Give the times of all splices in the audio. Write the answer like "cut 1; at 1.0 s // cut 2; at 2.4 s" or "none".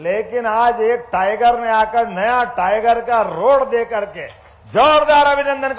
none